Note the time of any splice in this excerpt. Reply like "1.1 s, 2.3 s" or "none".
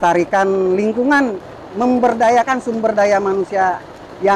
1.5 s